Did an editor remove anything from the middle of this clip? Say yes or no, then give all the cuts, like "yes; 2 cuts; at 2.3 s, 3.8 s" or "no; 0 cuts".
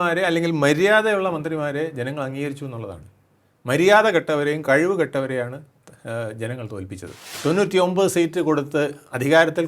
yes; 1 cut; at 7.3 s